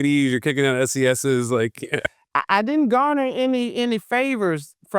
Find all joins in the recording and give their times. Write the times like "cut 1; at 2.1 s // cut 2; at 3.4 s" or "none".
cut 1; at 2.1 s